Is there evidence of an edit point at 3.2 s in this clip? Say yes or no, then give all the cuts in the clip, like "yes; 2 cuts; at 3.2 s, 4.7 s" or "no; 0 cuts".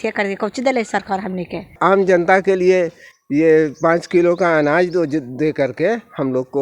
no; 1 cut; at 1.8 s